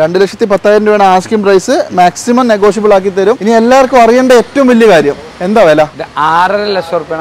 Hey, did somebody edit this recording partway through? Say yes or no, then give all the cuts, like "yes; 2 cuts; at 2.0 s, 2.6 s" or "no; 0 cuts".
yes; 2 cuts; at 3.4 s, 6.0 s